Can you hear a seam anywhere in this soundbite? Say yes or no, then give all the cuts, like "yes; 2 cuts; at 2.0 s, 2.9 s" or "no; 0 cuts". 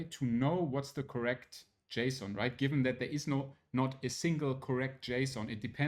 no; 0 cuts